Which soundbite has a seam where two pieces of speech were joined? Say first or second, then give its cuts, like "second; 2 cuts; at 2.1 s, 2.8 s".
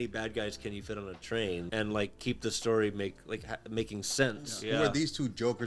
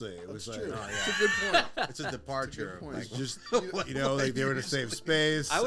first; 2 cuts; at 1.7 s, 4.5 s